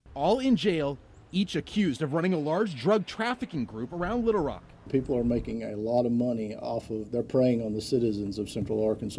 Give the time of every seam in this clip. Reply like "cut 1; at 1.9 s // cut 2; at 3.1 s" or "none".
none